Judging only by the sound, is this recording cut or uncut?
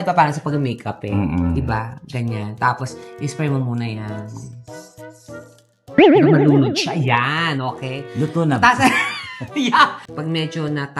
cut